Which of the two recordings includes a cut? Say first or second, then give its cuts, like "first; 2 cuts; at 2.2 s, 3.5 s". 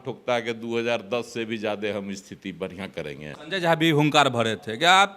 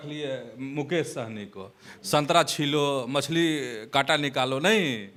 first; 1 cut; at 3.4 s